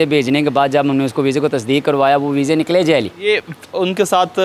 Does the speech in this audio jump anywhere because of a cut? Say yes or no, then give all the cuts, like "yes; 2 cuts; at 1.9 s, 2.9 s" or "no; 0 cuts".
yes; 1 cut; at 3.1 s